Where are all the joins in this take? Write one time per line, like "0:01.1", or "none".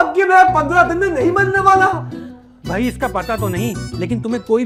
none